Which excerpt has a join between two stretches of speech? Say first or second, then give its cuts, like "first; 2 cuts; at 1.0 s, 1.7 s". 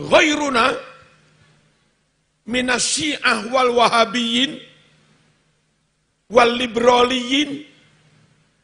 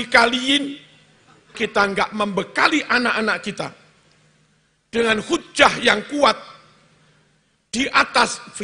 second; 1 cut; at 1.6 s